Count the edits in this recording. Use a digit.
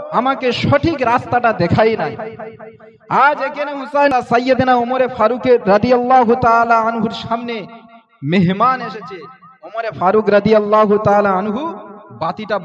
1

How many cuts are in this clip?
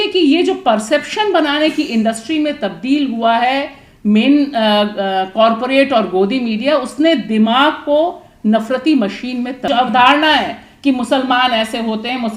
1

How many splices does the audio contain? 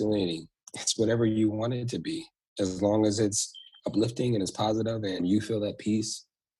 1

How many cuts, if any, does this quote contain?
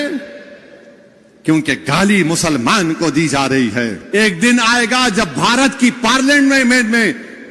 1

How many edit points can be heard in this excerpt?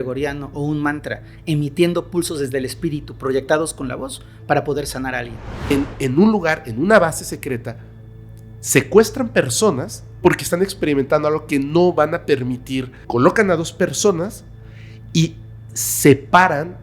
2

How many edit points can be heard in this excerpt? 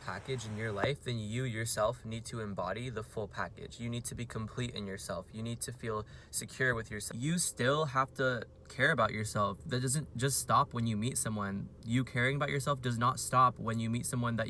1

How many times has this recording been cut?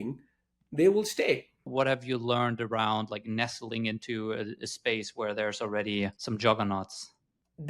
2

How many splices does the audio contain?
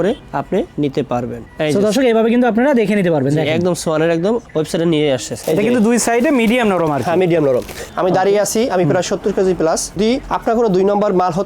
3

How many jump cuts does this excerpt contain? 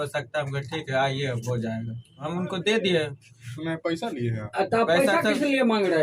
1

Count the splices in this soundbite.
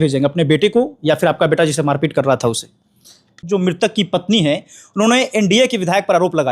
1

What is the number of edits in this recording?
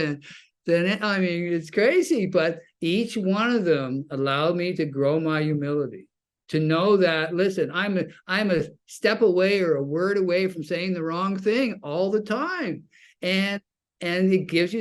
0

